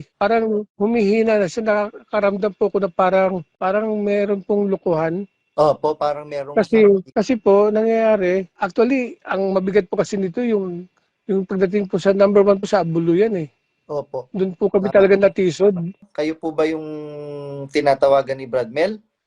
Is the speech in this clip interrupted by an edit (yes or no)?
yes